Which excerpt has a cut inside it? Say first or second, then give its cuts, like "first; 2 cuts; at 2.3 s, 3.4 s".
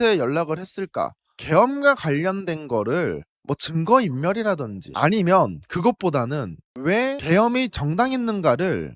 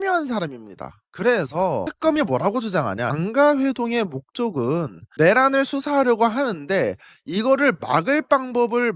second; 1 cut; at 1.0 s